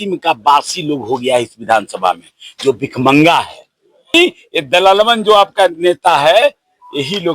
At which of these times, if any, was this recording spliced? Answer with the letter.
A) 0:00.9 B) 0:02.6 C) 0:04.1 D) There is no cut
C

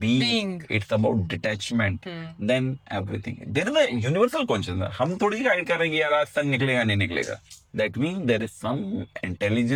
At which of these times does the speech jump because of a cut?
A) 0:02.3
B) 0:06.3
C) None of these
C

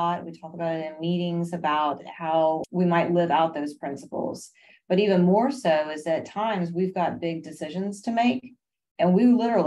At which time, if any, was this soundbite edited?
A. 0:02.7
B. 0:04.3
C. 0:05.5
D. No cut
A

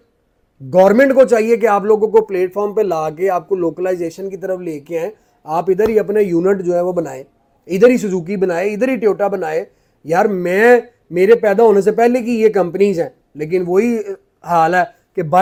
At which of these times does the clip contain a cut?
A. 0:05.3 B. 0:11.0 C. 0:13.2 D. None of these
D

